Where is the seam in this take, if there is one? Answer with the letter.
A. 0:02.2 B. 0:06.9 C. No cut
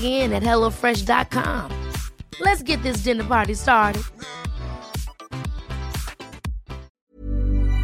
B